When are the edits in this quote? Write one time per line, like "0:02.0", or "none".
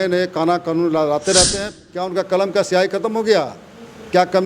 0:01.6